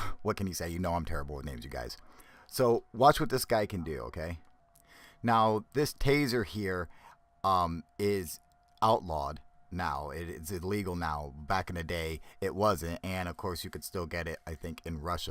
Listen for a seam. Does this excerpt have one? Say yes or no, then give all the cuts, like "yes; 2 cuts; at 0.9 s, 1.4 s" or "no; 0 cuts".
yes; 1 cut; at 9.0 s